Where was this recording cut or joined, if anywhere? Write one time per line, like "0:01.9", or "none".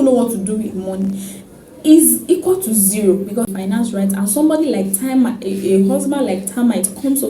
0:03.4